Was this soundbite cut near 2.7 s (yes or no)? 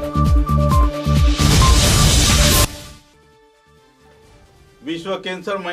yes